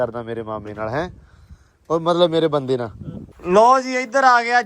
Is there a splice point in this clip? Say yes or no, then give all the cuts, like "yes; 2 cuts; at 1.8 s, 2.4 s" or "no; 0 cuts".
no; 0 cuts